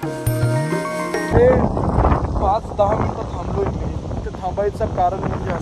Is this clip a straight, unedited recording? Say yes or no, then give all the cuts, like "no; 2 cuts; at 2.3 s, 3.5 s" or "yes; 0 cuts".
no; 1 cut; at 1.3 s